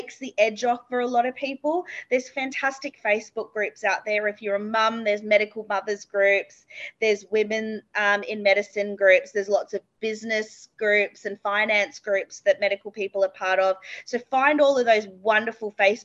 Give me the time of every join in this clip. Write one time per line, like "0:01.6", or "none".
none